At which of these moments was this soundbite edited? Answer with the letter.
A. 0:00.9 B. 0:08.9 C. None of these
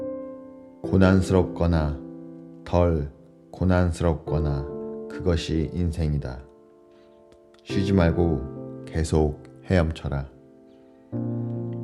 A